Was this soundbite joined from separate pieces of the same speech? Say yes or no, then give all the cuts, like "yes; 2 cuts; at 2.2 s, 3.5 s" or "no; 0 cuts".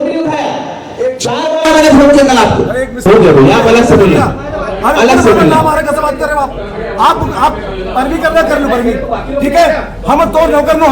yes; 1 cut; at 3.0 s